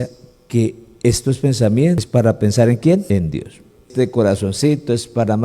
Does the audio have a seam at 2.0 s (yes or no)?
yes